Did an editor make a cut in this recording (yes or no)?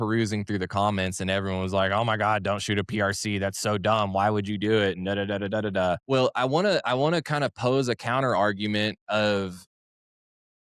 yes